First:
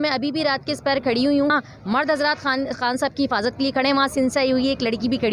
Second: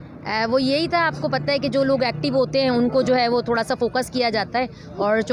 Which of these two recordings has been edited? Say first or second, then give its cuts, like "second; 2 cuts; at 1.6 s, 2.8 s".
first; 1 cut; at 1.5 s